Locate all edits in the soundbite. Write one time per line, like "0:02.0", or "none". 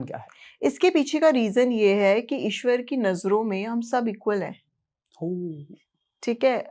none